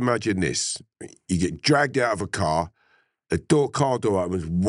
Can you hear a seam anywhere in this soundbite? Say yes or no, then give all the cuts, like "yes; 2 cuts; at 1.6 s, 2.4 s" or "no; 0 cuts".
no; 0 cuts